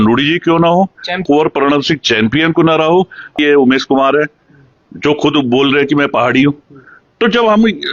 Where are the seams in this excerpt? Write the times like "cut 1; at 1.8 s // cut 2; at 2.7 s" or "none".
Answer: cut 1; at 1.2 s // cut 2; at 3.4 s